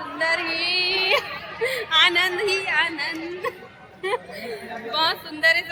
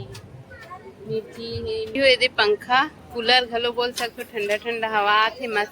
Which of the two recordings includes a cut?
second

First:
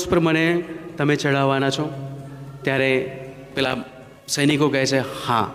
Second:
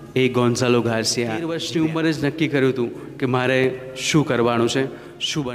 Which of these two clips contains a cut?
second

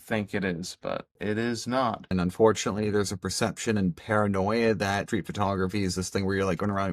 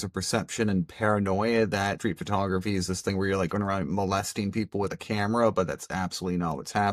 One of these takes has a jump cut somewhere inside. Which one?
first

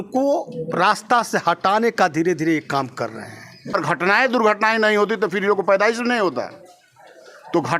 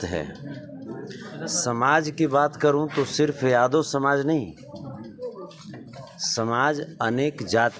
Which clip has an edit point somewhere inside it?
first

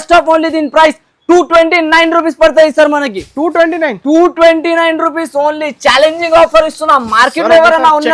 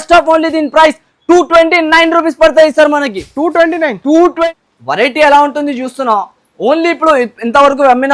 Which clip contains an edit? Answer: second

